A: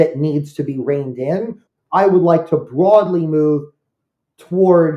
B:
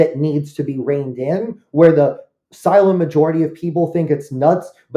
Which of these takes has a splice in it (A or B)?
A